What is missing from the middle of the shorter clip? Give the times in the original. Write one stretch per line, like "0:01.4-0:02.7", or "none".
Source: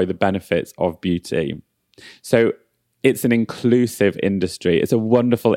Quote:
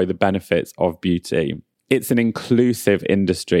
0:01.7-0:02.8